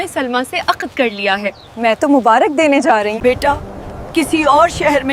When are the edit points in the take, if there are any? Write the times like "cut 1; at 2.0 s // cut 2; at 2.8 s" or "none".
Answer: cut 1; at 3.1 s

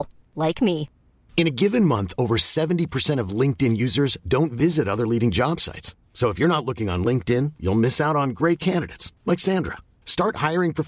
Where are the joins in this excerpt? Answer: none

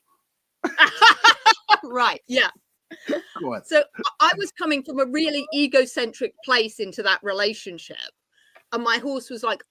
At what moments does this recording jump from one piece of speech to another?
none

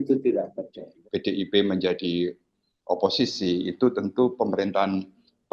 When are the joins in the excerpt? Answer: cut 1; at 0.9 s

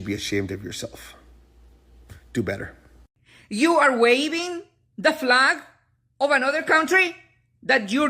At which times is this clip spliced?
cut 1; at 3.0 s

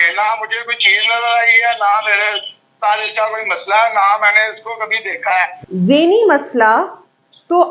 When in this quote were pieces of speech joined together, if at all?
cut 1; at 5.6 s

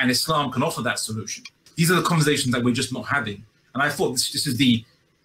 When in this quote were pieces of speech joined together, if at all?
cut 1; at 1.6 s

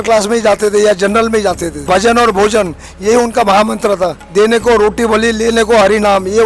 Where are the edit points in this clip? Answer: cut 1; at 1.8 s // cut 2; at 4.2 s

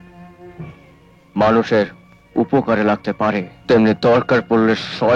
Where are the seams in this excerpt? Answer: cut 1; at 3.5 s

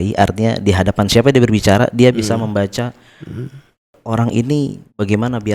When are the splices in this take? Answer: cut 1; at 4.0 s

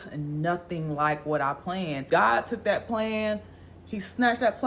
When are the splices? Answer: cut 1; at 2.0 s

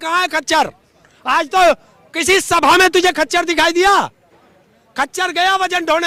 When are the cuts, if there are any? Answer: none

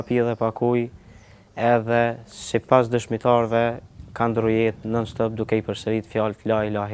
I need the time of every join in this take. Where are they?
none

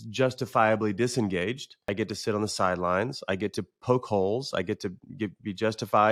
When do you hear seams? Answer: cut 1; at 1.8 s

